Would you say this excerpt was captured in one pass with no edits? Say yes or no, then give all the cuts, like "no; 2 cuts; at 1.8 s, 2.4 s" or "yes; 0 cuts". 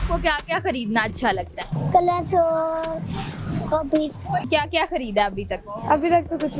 no; 2 cuts; at 1.7 s, 4.5 s